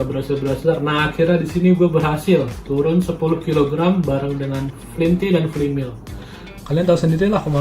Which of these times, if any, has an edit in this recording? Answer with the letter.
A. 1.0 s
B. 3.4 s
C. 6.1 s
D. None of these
C